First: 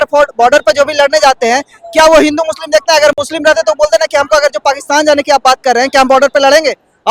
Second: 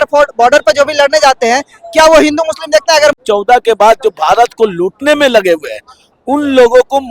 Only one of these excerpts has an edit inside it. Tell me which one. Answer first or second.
second